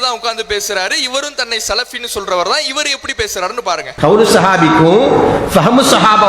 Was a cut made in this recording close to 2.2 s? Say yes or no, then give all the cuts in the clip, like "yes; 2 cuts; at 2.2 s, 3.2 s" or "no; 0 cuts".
no; 1 cut; at 3.9 s